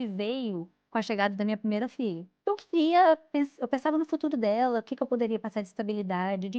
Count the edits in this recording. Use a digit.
1